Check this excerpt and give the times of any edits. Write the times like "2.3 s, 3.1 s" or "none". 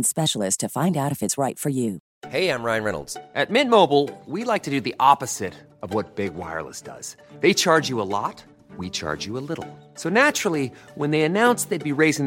2.1 s